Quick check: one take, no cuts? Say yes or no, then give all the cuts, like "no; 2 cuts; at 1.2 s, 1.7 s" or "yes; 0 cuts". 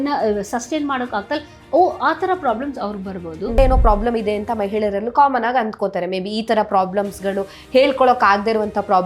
no; 1 cut; at 3.5 s